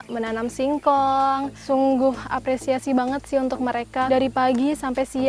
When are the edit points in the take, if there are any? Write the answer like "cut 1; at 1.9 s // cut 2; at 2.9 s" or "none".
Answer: cut 1; at 1.5 s // cut 2; at 4.1 s